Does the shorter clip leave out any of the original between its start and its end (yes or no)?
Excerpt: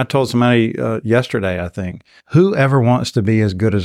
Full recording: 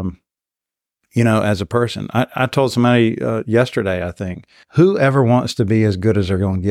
no